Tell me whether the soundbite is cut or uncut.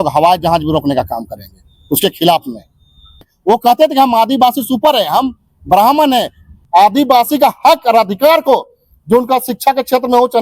cut